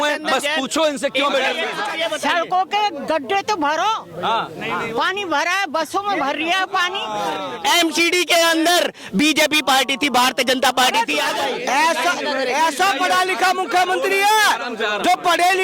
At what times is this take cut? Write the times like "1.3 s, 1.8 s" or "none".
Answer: 1.8 s, 7.5 s